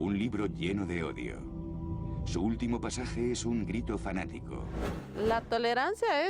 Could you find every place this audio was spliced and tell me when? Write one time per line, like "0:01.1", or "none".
0:04.8